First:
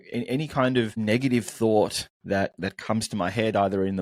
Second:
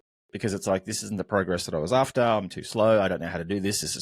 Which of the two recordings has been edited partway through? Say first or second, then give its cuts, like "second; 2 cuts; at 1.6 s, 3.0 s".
first; 2 cuts; at 0.9 s, 2.1 s